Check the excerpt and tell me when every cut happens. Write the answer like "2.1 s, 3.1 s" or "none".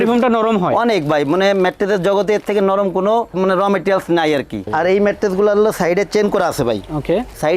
4.7 s